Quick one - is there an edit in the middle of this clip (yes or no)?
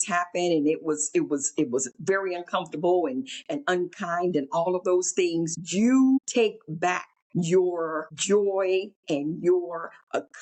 yes